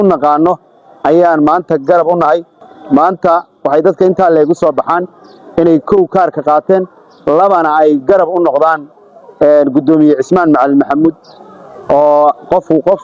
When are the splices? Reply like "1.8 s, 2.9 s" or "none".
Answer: 2.5 s

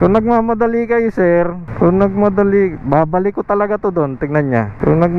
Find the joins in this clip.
none

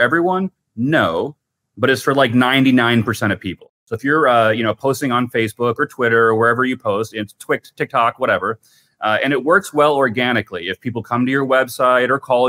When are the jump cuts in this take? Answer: 3.7 s

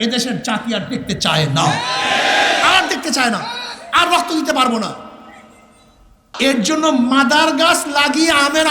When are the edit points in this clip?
6.3 s

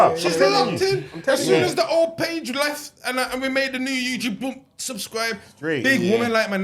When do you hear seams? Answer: none

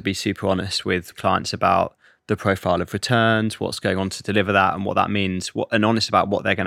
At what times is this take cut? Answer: 1.1 s, 3.8 s

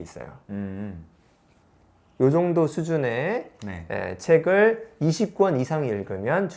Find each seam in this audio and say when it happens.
none

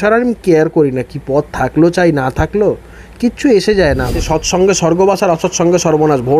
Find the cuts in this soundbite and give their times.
4.2 s

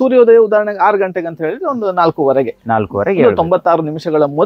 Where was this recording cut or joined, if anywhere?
none

